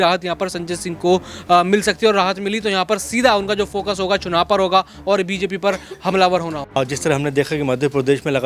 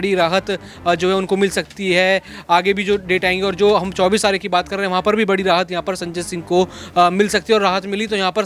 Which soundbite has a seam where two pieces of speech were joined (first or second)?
first